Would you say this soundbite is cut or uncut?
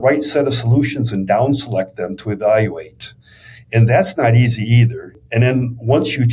cut